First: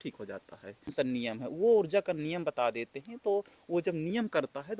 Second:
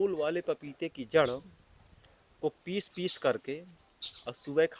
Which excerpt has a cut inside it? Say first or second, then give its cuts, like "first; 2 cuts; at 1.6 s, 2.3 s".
first; 1 cut; at 0.9 s